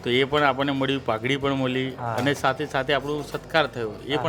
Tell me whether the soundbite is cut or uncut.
uncut